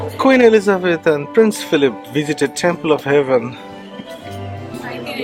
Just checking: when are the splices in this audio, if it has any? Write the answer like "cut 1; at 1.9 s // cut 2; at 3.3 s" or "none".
none

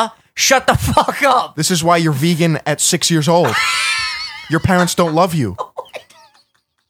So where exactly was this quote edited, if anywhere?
cut 1; at 1.6 s

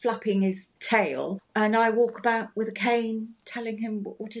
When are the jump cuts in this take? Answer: cut 1; at 1.1 s

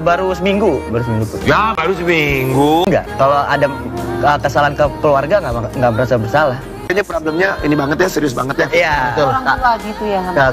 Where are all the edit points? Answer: none

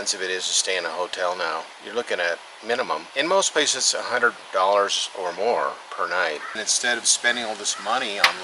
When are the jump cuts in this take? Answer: cut 1; at 3.1 s // cut 2; at 6.6 s

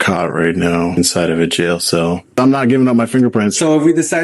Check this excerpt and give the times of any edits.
cut 1; at 1.0 s // cut 2; at 2.4 s

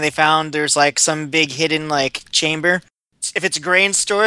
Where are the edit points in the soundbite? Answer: cut 1; at 3.0 s

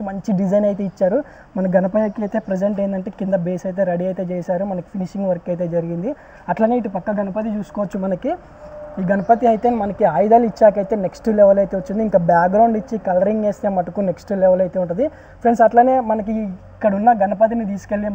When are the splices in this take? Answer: none

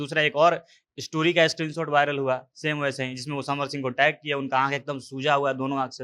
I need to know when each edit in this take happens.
none

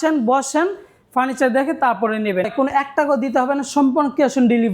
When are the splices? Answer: cut 1; at 2.5 s

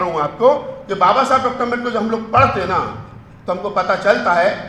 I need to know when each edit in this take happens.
none

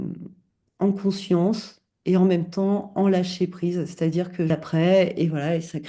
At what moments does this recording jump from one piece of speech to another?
cut 1; at 4.5 s

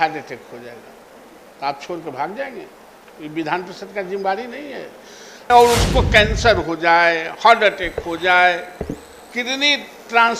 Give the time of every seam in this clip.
cut 1; at 5.3 s

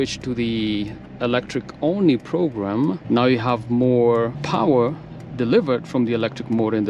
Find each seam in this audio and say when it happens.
cut 1; at 3.0 s // cut 2; at 4.4 s

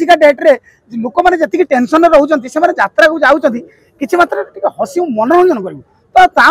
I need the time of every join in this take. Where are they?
none

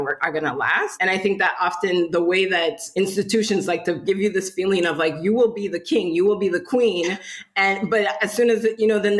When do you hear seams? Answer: cut 1; at 0.9 s // cut 2; at 2.8 s // cut 3; at 4.0 s

